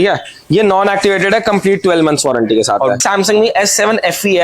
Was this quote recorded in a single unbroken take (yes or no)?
no